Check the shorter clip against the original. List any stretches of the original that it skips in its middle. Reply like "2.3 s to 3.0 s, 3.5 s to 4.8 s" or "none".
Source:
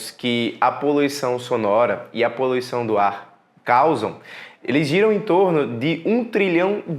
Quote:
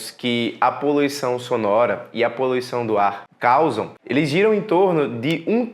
3.3 s to 3.5 s, 4.2 s to 4.5 s